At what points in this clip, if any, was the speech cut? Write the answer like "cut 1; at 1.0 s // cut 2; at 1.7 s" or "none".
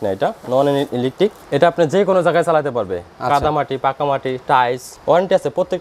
cut 1; at 1.4 s // cut 2; at 4.9 s